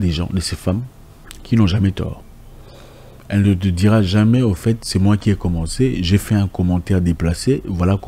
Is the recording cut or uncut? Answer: uncut